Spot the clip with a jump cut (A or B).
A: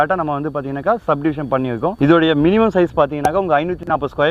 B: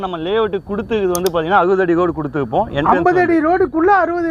A